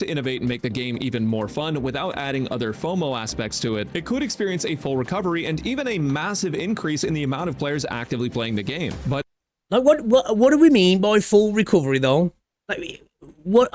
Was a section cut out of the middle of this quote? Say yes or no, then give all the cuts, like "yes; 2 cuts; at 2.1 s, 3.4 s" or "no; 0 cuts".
no; 0 cuts